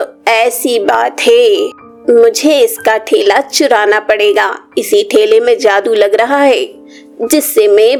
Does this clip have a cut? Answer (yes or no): no